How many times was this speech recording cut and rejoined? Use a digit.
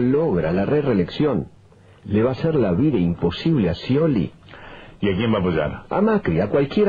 0